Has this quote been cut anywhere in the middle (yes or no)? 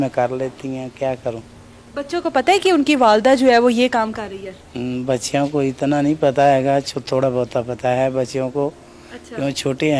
no